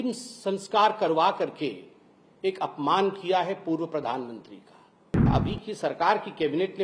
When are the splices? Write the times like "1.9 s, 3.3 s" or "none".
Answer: 5.3 s